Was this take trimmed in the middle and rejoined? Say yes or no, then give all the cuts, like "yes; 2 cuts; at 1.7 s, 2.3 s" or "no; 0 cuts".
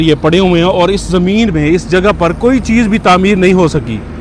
no; 0 cuts